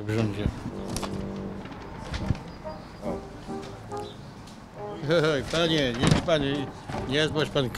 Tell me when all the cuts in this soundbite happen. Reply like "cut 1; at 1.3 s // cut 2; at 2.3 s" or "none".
none